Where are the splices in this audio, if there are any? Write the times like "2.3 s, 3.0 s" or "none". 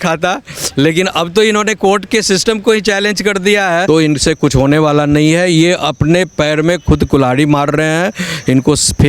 3.8 s

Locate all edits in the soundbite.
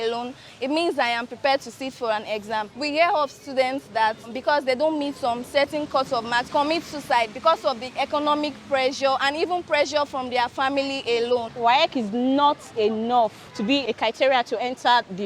2.7 s, 4.4 s, 6.5 s, 11.5 s, 13.8 s

